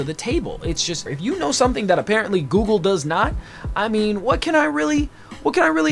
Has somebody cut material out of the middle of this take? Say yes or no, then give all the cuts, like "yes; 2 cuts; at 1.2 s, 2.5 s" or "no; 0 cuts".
yes; 1 cut; at 1.1 s